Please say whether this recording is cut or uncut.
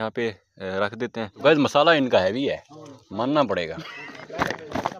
cut